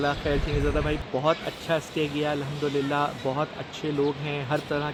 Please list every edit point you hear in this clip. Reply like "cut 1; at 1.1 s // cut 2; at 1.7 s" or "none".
none